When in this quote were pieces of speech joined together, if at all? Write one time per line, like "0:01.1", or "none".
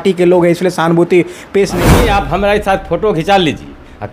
0:01.9

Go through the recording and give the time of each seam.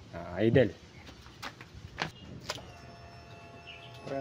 0:02.2

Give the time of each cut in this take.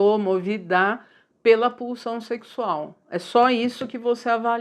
none

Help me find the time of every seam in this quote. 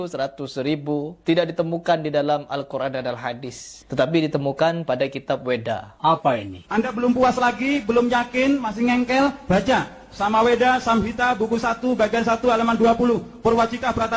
0:01.1
0:06.3

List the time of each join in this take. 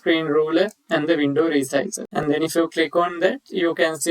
0:02.2

